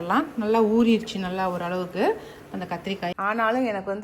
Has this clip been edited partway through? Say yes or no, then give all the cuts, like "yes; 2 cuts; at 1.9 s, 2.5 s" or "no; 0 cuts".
yes; 1 cut; at 3.2 s